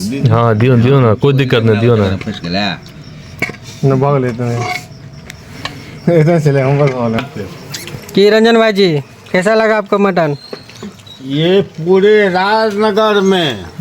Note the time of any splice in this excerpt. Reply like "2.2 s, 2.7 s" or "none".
7.1 s

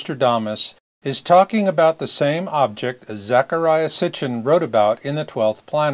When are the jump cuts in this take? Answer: 4.1 s

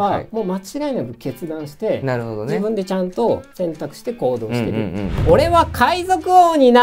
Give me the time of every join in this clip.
5.1 s

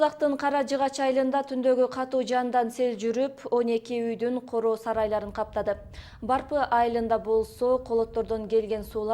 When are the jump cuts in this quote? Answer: 2.1 s

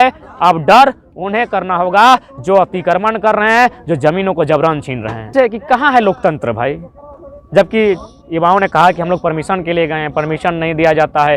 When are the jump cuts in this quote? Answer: 5.1 s

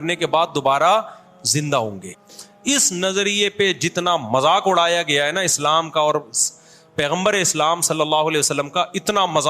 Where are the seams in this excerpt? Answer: 2.3 s

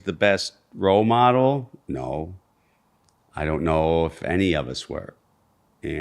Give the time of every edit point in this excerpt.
1.7 s

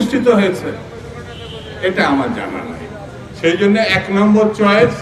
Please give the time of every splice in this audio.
none

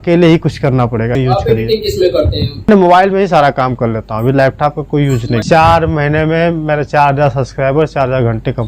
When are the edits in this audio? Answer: 1.1 s, 2.7 s, 5.5 s

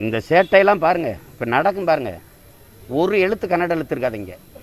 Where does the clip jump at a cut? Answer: none

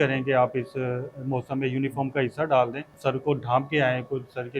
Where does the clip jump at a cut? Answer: 2.9 s

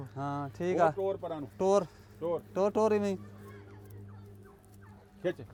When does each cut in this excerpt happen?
none

